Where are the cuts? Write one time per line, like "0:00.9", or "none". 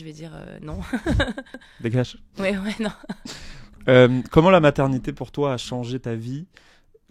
none